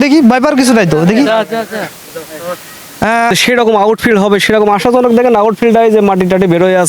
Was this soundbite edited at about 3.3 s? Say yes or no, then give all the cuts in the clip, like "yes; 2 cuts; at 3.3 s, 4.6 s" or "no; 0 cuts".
yes; 1 cut; at 3.3 s